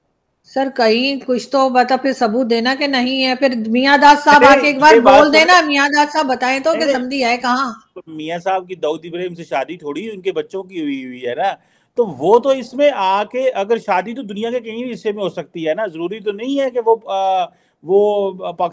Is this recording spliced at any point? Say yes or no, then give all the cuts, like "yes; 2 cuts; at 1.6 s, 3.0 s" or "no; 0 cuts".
no; 0 cuts